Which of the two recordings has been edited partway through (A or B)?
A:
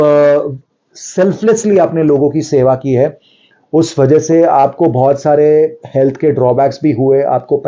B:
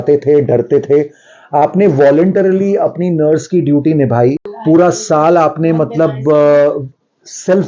B